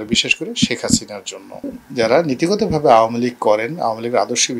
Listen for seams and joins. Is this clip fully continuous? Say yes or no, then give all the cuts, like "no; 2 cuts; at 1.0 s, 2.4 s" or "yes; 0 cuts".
no; 1 cut; at 1.8 s